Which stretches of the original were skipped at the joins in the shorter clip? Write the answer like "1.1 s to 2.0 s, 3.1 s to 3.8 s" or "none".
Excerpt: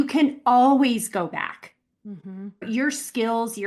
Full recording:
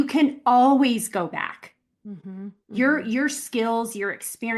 2.6 s to 3.0 s